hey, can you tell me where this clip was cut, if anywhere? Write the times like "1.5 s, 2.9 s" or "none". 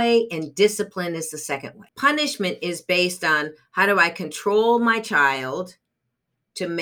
1.8 s